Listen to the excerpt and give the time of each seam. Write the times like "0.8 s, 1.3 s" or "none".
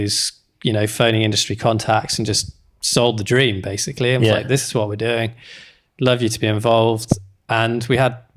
none